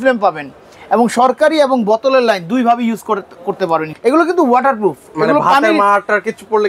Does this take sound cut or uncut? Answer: cut